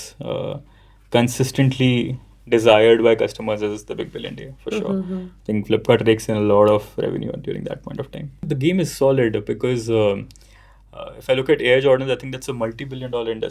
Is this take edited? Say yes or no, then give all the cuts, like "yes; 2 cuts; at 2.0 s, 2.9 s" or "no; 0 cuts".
yes; 1 cut; at 8.5 s